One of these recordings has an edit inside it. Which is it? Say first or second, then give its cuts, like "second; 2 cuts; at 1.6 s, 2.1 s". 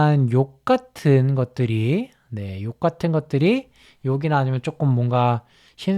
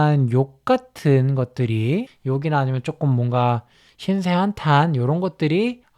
second; 1 cut; at 2.1 s